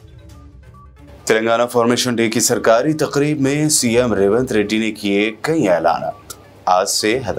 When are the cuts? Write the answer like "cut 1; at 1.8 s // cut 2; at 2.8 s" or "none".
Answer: none